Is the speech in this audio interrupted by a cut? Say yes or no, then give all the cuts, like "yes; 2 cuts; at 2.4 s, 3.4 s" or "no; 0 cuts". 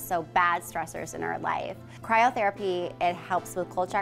no; 0 cuts